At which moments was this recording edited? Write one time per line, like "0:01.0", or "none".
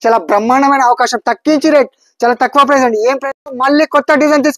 0:03.6